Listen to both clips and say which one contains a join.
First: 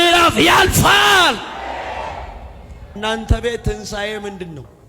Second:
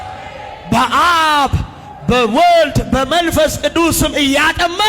first; 1 cut; at 3.0 s

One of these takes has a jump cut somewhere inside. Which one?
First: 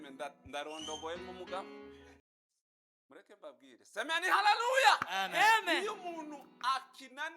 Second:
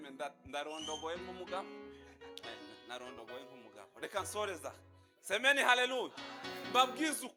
first; 1 cut; at 2.1 s

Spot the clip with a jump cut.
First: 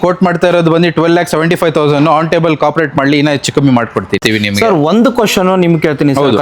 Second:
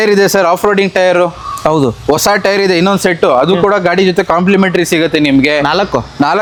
first; 1 cut; at 4.2 s

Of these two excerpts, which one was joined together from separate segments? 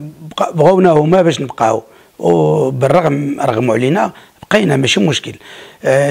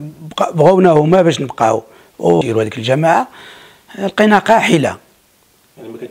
second; 1 cut; at 2.4 s

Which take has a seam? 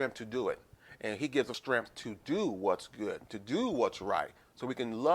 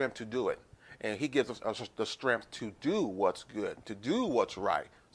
first; 1 cut; at 1.6 s

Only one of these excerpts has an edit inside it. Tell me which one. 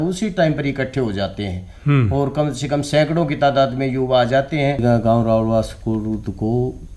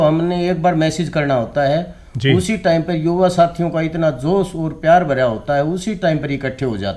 first; 1 cut; at 4.8 s

